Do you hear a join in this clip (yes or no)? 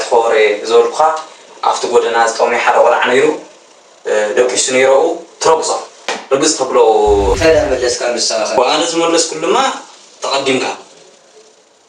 yes